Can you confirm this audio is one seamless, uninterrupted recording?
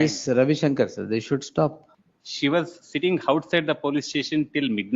no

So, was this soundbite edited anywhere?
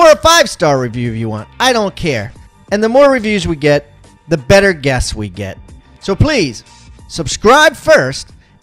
no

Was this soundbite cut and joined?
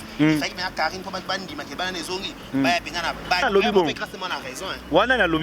yes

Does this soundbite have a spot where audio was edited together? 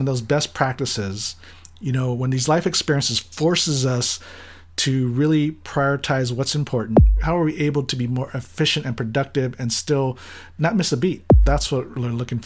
yes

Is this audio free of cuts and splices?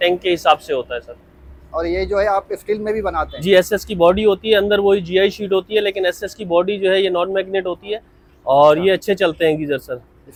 yes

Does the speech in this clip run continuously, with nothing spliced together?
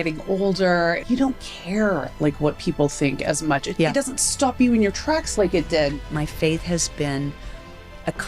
no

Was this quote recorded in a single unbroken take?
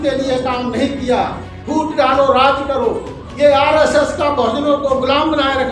no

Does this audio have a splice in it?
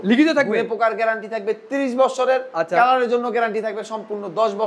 no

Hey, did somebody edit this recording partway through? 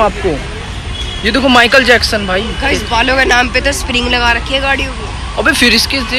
no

